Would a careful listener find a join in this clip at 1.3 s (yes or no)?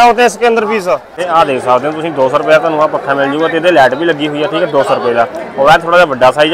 yes